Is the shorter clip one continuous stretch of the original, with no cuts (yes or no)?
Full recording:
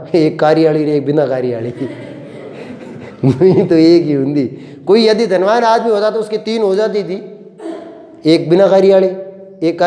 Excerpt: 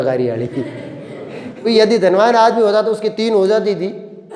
no